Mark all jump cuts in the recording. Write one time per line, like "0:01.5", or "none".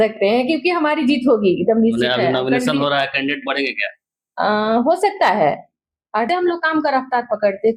0:06.3